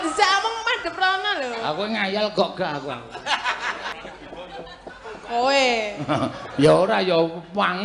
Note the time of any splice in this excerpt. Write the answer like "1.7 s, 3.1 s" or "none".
3.9 s